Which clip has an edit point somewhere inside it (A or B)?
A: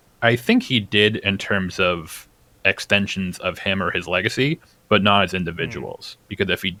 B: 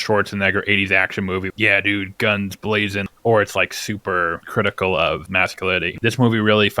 B